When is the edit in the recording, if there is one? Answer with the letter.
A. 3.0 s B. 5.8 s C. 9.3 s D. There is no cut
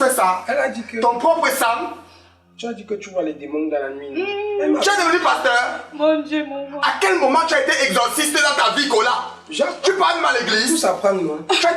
D